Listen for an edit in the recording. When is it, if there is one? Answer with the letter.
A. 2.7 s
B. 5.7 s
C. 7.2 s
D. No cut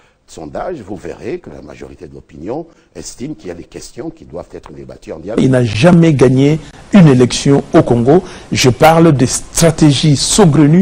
B